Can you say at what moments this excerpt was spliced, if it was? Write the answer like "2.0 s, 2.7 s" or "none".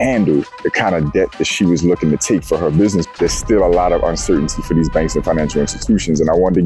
3.1 s

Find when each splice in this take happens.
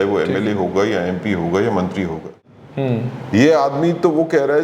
2.3 s

